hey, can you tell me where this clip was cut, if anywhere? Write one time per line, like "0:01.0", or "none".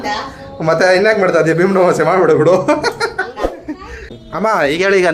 0:03.4